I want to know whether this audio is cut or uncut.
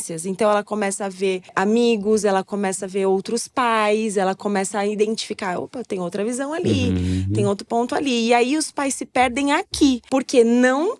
cut